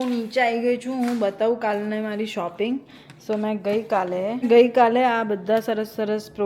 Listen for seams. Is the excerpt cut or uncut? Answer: uncut